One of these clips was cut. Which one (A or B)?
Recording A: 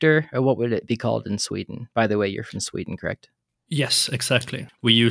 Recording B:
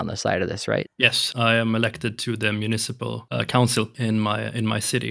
B